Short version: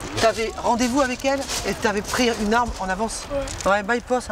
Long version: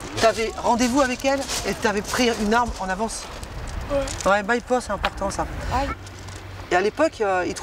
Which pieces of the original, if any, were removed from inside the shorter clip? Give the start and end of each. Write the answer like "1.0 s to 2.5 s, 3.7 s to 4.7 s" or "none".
3.2 s to 3.8 s